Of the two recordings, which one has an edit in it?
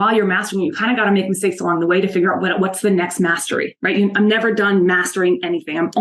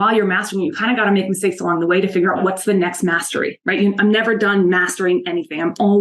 second; 1 cut; at 2.4 s

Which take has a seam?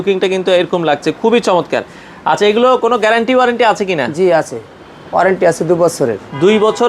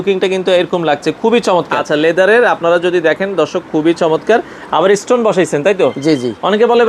second; 1 cut; at 1.8 s

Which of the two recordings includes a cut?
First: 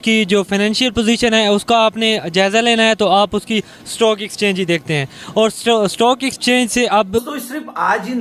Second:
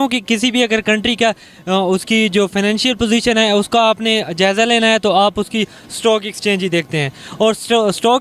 first; 1 cut; at 7.2 s

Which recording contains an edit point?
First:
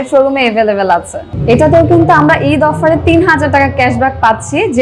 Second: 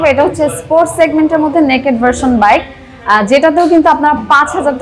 first; 1 cut; at 1.3 s

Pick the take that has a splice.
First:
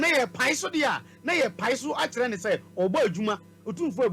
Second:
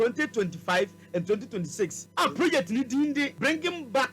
second; 2 cuts; at 2.0 s, 3.3 s

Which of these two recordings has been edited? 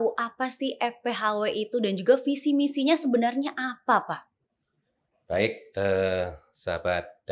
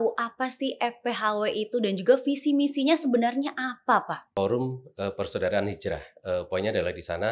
second; 1 cut; at 4.2 s

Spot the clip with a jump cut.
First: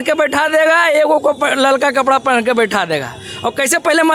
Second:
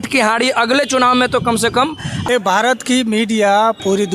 second; 1 cut; at 2.2 s

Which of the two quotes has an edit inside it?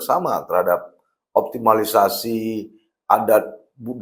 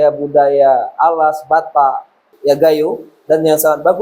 second; 1 cut; at 2.3 s

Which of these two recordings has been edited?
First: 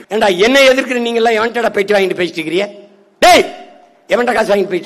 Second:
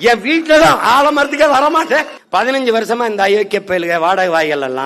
second; 1 cut; at 2.2 s

